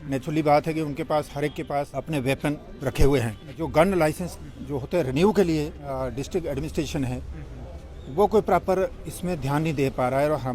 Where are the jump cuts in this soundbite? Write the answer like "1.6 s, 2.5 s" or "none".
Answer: 1.9 s, 3.5 s, 6.0 s